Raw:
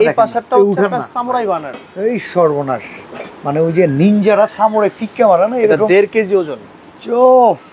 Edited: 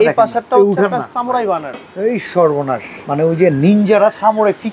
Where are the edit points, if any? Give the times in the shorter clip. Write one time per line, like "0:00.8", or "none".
0:02.9